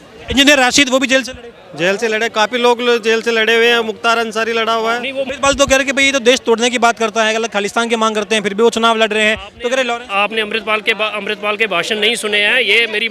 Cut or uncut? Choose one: cut